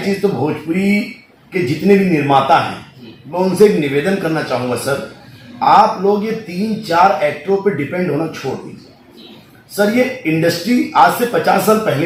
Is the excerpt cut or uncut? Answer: uncut